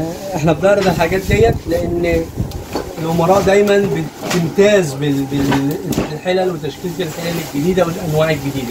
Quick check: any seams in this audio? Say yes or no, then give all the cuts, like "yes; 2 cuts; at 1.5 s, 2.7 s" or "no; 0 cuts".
no; 0 cuts